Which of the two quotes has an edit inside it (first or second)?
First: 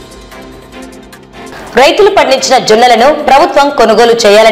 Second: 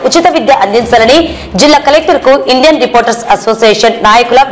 first